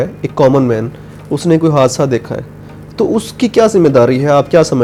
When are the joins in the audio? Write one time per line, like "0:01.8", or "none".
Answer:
none